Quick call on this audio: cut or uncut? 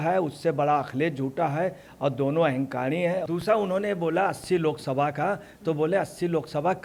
uncut